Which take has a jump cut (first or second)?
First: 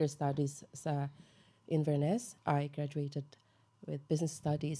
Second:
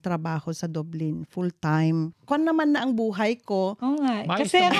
second